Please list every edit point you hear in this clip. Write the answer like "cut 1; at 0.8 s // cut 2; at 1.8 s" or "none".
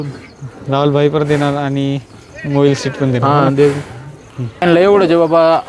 cut 1; at 4.6 s